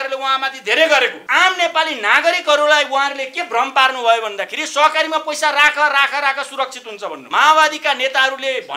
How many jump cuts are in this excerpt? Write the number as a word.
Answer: two